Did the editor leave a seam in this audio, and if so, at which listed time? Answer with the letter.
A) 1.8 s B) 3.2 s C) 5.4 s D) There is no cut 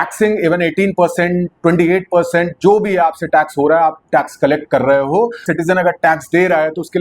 C